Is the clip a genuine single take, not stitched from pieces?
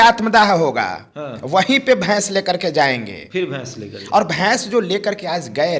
yes; 0 cuts

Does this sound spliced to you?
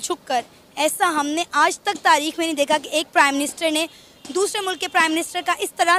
no; 0 cuts

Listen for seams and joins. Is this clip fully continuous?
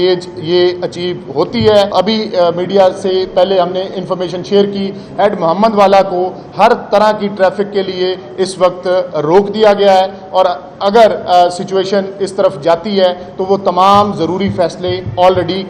yes; 0 cuts

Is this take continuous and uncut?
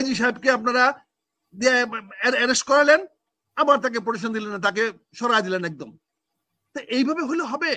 yes; 0 cuts

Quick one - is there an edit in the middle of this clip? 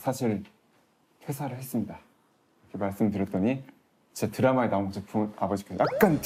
no; 0 cuts

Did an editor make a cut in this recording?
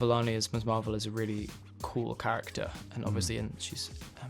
no; 0 cuts

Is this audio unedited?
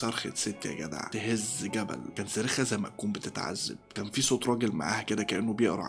no; 1 cut; at 1.0 s

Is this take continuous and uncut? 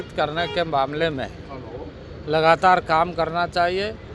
yes; 0 cuts

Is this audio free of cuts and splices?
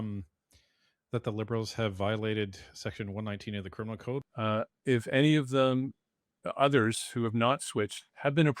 no; 1 cut; at 4.3 s

